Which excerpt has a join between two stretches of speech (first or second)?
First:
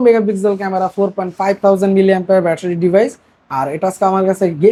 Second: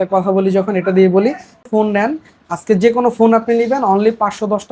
second